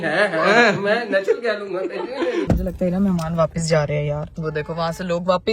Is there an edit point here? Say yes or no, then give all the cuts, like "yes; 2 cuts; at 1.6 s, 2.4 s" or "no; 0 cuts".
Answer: yes; 2 cuts; at 2.5 s, 4.4 s